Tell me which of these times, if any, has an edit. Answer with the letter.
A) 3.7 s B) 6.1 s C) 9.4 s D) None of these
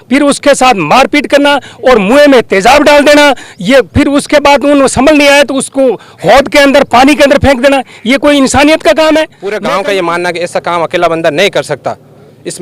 C